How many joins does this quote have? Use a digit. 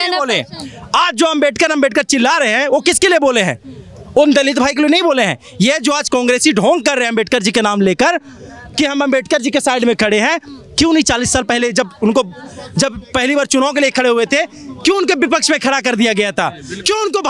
0